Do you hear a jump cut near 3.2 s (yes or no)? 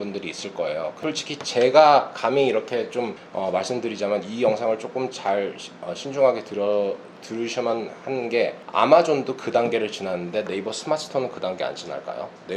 yes